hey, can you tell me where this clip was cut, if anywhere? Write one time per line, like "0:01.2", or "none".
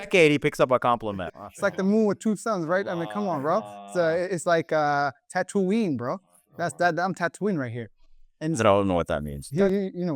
0:01.3